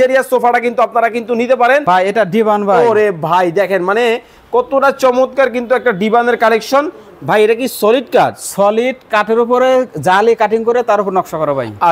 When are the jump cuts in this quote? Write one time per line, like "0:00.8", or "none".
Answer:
0:01.8